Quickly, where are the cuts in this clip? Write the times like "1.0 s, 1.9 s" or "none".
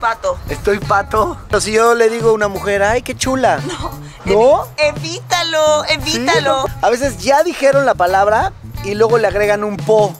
1.5 s, 6.7 s